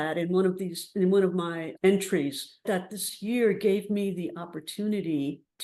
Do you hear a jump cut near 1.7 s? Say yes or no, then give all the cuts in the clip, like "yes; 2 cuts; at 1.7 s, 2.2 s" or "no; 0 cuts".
yes; 2 cuts; at 1.7 s, 2.6 s